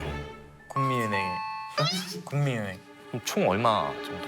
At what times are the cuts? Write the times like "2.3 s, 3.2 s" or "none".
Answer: 2.9 s